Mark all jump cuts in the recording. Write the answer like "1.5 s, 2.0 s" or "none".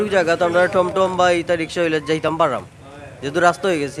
none

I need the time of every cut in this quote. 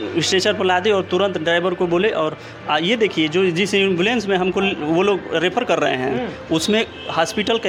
none

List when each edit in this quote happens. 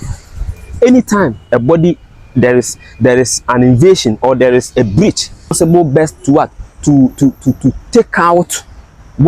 5.6 s

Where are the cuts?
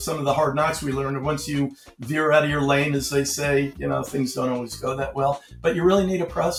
none

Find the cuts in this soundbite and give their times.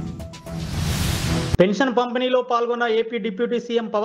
1.5 s

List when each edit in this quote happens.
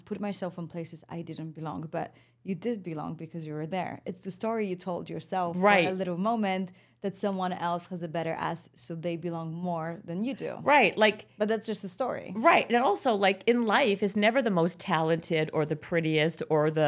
none

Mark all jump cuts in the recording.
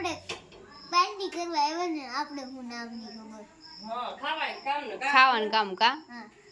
none

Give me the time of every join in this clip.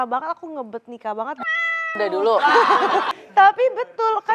3.2 s

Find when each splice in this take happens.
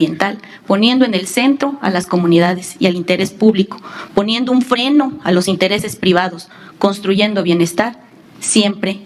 none

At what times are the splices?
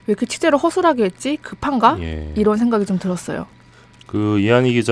1.9 s

